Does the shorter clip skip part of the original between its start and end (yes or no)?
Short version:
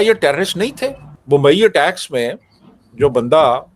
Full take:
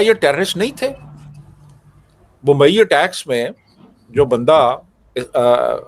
yes